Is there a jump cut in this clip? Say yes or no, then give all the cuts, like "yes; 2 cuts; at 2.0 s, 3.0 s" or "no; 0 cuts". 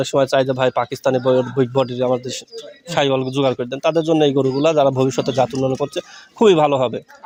no; 0 cuts